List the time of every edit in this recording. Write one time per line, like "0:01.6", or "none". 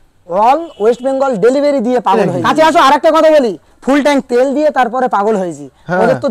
0:02.3